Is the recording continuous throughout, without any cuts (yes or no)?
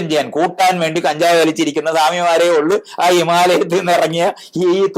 yes